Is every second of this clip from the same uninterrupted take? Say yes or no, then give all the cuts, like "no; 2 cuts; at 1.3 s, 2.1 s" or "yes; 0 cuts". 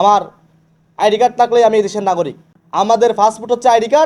no; 1 cut; at 2.4 s